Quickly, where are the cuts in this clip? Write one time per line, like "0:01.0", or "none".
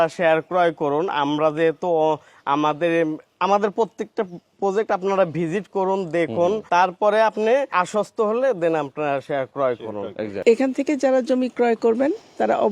0:06.6
0:07.7
0:10.4

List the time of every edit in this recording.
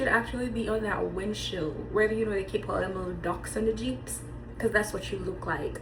none

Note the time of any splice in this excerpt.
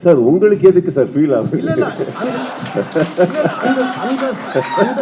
none

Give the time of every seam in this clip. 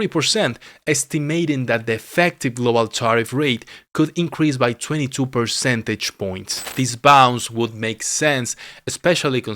0:06.7

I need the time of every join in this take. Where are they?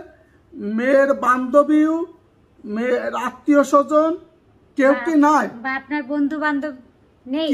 none

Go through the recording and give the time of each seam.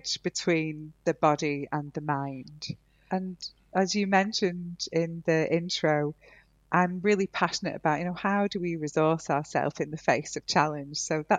none

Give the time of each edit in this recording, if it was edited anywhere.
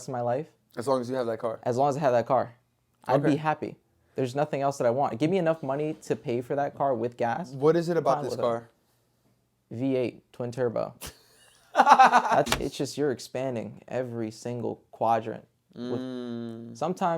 0:12.5

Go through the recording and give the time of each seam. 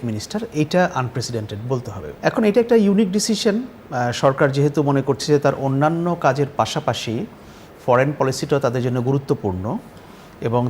0:02.0

